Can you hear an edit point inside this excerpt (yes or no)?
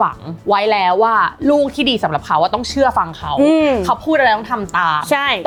no